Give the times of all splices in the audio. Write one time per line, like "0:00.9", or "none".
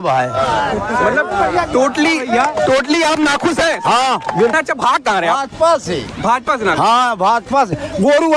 0:04.5